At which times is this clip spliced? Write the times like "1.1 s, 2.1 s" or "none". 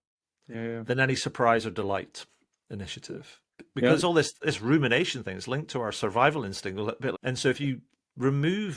7.1 s